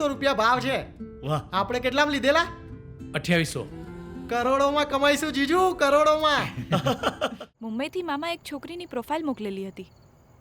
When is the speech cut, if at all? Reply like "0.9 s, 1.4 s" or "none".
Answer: 7.5 s

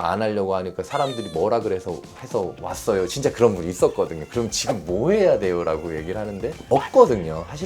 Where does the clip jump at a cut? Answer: 6.7 s

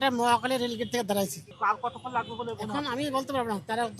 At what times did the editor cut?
1.4 s

